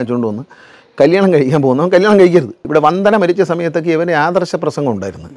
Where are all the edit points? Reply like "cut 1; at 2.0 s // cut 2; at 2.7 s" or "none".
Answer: cut 1; at 2.6 s